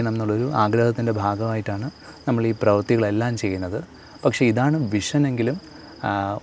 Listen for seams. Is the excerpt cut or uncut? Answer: uncut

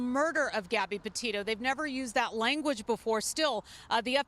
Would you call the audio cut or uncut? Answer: cut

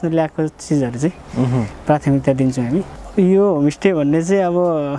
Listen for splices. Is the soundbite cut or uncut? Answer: cut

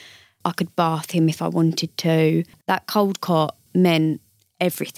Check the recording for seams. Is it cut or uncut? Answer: cut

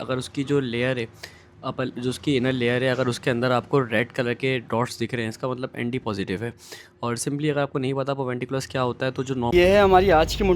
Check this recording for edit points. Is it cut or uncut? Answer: cut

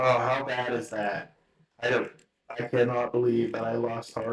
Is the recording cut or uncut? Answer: uncut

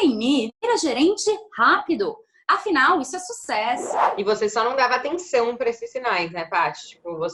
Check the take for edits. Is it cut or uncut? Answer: cut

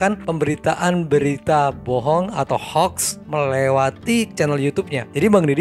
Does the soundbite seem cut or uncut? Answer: uncut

